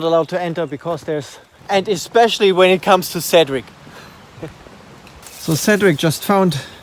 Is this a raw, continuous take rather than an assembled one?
no; 2 cuts; at 1.5 s, 5.3 s

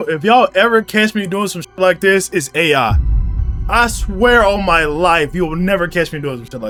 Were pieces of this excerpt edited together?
no; 0 cuts

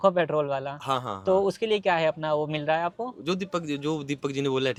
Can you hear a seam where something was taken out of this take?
no; 0 cuts

